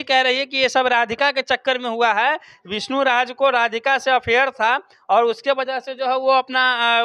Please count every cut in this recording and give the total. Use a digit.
0